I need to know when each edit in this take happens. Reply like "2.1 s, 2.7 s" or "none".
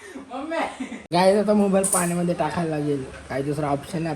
1.0 s

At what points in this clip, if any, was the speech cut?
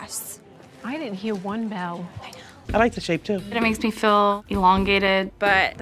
2.7 s

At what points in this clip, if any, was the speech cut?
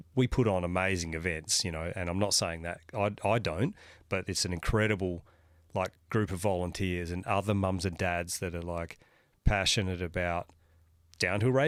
none

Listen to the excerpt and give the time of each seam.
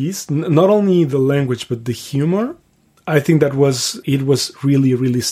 4.0 s

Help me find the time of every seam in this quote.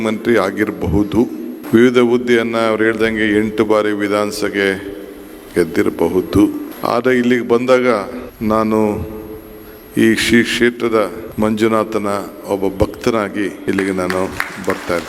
1.5 s, 6.7 s, 8.2 s, 11.2 s, 13.6 s

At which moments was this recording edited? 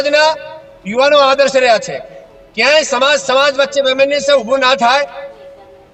none

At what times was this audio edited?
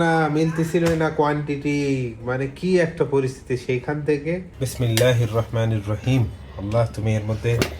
4.6 s

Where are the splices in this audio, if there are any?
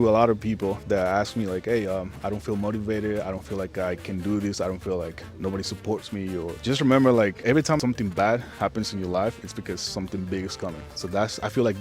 6.6 s, 7.7 s, 10.9 s

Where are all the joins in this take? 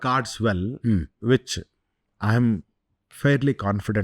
none

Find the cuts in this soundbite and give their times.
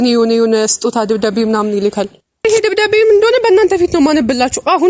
2.4 s

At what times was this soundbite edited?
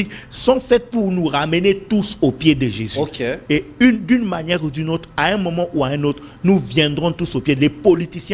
none

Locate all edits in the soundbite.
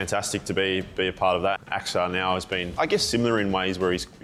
1.6 s, 2.7 s

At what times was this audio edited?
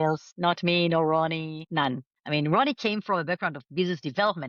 none

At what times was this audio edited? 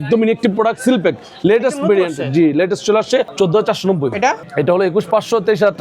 3.3 s, 4.4 s

